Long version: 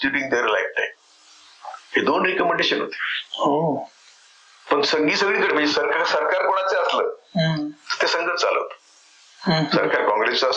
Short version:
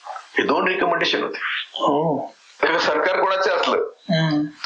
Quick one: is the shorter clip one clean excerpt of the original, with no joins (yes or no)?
no